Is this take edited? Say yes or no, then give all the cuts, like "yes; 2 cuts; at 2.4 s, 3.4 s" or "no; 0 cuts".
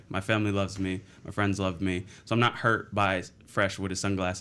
no; 0 cuts